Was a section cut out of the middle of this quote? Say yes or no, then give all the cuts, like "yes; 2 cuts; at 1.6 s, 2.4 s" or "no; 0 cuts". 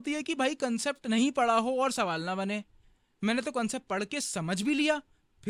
no; 0 cuts